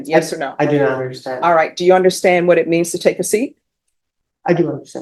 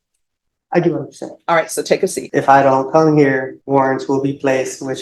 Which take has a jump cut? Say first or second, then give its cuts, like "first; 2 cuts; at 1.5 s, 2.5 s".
second; 2 cuts; at 2.2 s, 3.5 s